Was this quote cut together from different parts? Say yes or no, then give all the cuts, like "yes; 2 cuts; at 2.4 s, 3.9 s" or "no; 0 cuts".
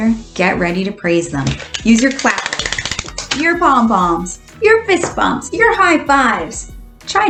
no; 0 cuts